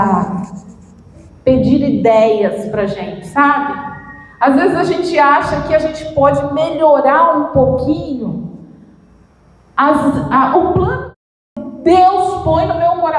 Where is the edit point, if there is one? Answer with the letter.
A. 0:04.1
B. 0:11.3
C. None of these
B